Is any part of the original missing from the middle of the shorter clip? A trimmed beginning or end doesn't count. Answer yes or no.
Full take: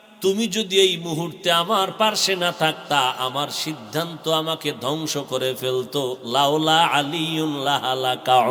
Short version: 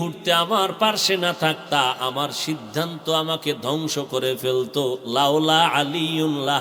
no